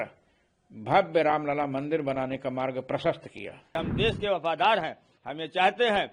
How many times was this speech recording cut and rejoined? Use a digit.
1